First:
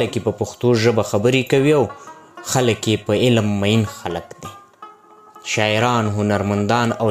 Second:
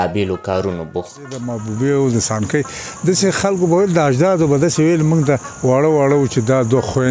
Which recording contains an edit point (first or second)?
second